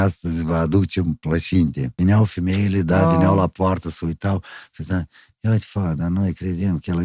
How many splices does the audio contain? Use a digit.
1